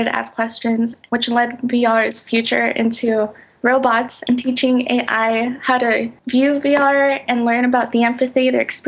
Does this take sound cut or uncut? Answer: uncut